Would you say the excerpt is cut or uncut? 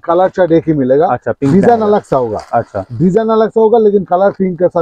uncut